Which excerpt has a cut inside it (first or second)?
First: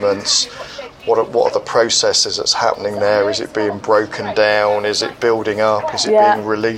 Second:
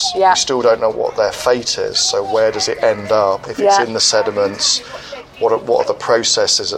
first